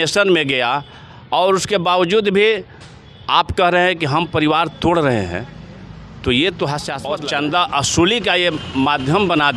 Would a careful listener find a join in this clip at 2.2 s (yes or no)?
no